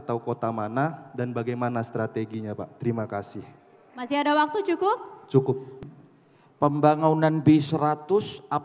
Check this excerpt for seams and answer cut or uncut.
cut